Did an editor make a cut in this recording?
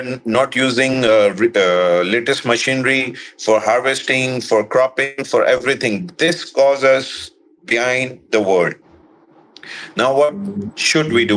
no; 0 cuts

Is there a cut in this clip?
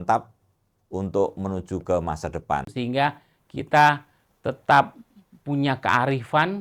yes; 1 cut; at 2.7 s

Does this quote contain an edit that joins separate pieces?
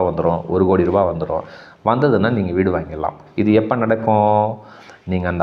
no; 0 cuts

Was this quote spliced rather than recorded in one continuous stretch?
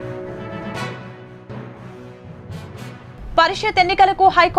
yes; 1 cut; at 2.2 s

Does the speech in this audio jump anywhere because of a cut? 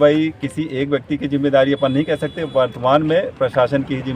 no; 0 cuts

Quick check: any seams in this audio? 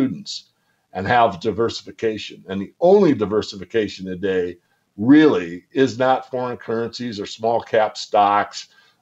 no; 0 cuts

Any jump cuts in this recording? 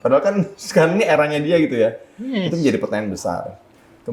no; 0 cuts

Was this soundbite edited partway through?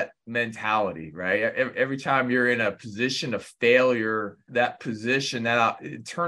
yes; 1 cut; at 4.5 s

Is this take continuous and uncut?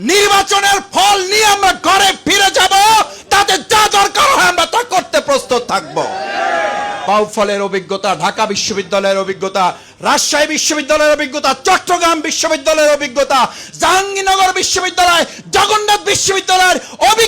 no; 1 cut; at 7.0 s

